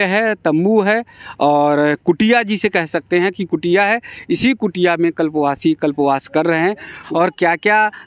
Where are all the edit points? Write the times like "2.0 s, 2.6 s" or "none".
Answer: 6.9 s